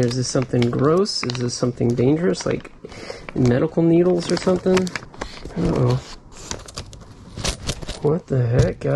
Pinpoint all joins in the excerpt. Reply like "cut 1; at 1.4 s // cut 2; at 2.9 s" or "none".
cut 1; at 5.0 s

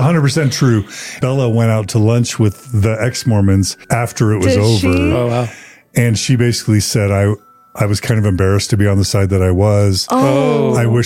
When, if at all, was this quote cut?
cut 1; at 1.1 s // cut 2; at 3.8 s

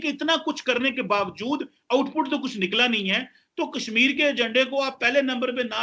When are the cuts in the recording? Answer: none

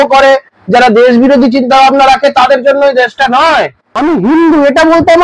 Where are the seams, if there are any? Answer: cut 1; at 3.8 s

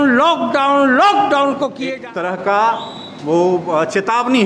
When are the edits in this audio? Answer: cut 1; at 1.8 s

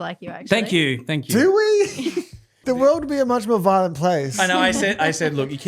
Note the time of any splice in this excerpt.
cut 1; at 2.6 s

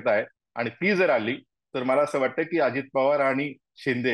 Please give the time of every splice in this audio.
none

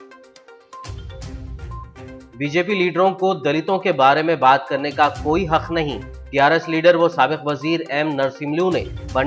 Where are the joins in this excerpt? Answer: cut 1; at 1.4 s // cut 2; at 2.0 s

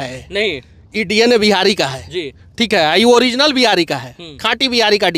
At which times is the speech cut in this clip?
none

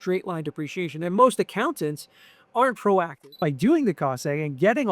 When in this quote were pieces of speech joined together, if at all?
cut 1; at 3.1 s

